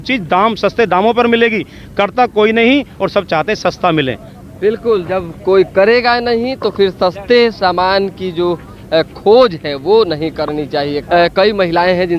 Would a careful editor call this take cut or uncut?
uncut